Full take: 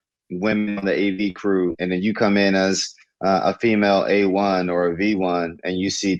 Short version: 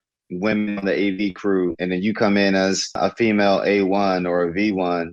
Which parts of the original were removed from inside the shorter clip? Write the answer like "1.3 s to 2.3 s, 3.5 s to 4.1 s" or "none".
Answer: 3.0 s to 3.4 s